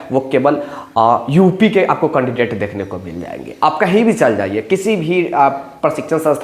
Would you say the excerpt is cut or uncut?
uncut